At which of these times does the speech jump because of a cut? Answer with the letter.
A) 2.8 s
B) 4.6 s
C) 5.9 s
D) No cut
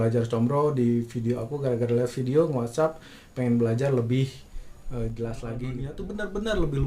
C